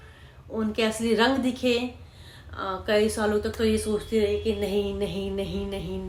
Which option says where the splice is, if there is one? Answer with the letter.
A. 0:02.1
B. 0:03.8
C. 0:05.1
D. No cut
D